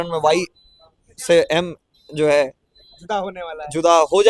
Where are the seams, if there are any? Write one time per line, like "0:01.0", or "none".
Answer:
none